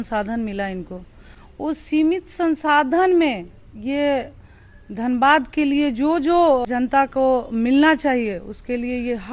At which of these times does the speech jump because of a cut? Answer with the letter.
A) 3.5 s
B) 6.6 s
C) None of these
B